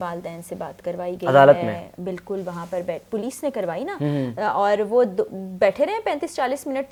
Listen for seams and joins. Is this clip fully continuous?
yes; 0 cuts

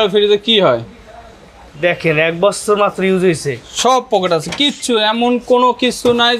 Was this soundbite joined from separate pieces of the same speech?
no; 0 cuts

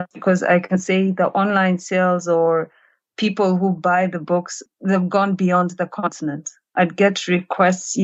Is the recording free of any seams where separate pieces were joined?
yes; 0 cuts

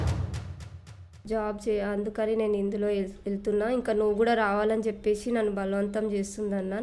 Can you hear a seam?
yes; 1 cut; at 1.1 s

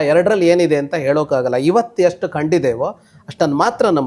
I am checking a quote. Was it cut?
no; 0 cuts

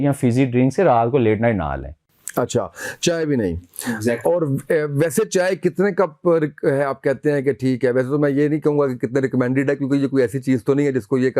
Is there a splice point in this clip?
no; 0 cuts

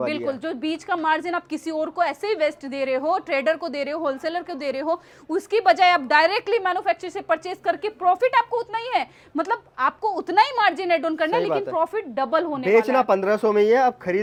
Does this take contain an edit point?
no; 0 cuts

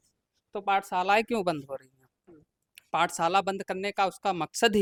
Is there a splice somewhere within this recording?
no; 0 cuts

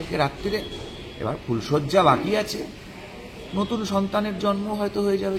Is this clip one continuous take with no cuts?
yes; 0 cuts

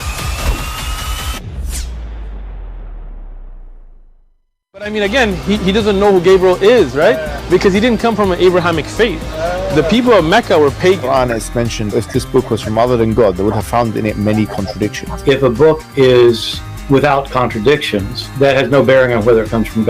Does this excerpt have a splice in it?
yes; 1 cut; at 12.0 s

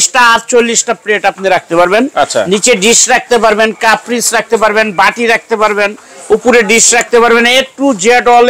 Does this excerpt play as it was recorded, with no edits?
yes; 0 cuts

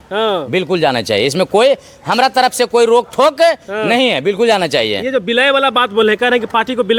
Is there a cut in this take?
no; 0 cuts

